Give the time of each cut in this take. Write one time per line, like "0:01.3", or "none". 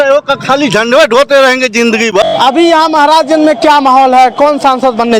0:02.1